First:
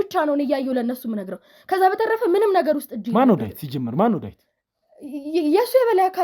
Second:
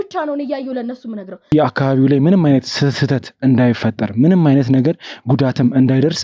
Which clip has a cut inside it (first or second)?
second